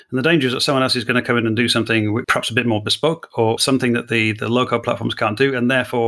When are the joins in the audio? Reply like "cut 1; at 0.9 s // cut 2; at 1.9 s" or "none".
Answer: cut 1; at 2.3 s // cut 2; at 3.6 s